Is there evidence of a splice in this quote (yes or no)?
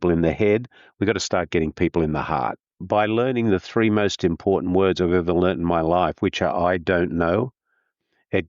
yes